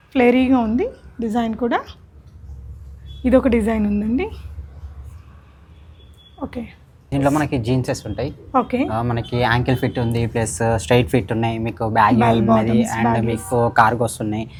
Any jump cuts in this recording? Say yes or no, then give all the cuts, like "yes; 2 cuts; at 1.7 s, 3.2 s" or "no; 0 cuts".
no; 0 cuts